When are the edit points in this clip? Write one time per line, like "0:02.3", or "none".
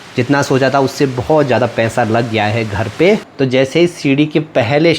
0:03.3